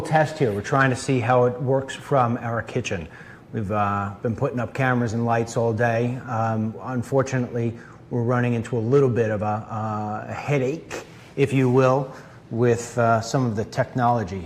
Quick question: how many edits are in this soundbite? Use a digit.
1